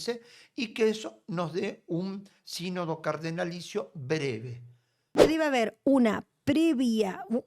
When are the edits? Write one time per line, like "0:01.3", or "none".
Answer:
0:05.2